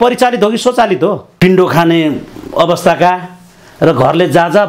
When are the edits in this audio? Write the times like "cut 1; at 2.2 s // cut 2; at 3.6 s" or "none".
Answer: cut 1; at 1.3 s